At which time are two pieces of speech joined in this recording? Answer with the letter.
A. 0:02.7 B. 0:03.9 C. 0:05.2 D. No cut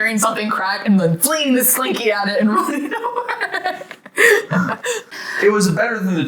C